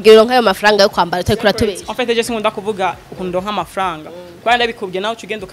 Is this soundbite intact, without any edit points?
yes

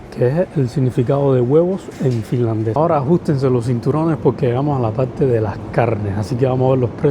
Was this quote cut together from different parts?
yes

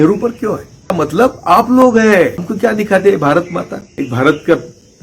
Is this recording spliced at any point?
yes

